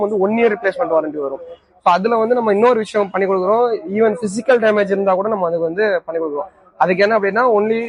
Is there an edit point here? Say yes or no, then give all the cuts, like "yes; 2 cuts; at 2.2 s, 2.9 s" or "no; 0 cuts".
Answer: no; 0 cuts